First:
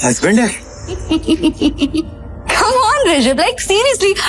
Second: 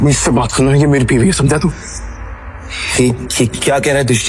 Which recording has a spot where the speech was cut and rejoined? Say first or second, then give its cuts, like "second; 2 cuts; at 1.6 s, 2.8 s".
first; 1 cut; at 1.0 s